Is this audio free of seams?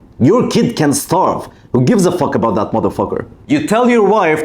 no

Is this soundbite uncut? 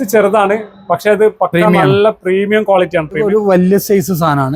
no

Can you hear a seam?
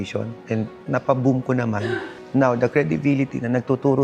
yes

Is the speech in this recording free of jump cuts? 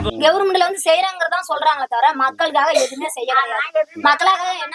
yes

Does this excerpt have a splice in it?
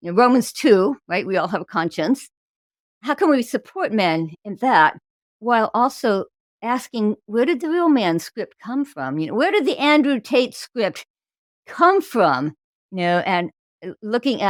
no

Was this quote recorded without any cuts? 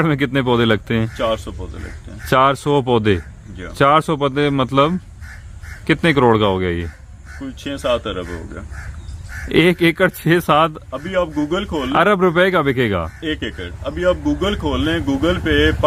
yes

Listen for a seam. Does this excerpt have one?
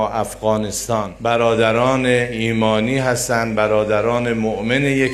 yes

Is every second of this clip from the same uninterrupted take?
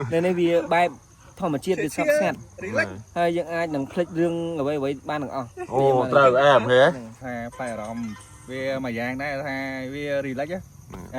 no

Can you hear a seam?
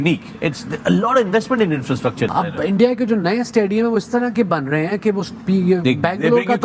yes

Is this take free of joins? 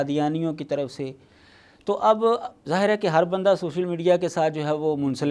yes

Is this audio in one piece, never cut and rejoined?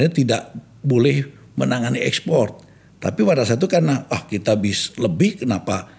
yes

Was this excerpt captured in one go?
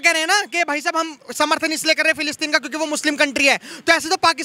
yes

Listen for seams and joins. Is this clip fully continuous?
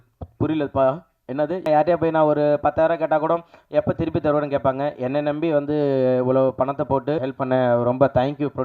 no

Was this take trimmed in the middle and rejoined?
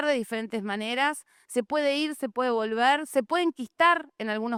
no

